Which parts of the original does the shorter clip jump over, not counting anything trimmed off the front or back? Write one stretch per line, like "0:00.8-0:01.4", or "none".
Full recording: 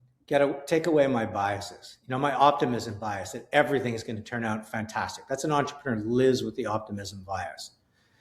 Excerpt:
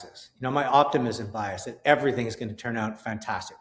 none